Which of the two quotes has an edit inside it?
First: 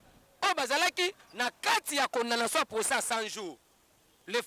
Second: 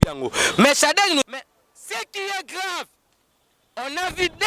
second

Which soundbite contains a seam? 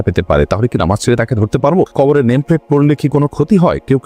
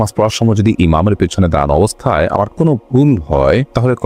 first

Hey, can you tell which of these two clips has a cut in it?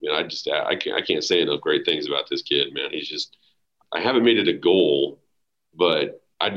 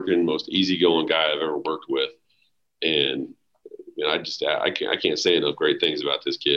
first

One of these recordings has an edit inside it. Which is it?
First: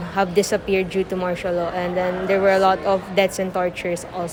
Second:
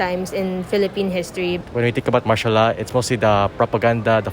second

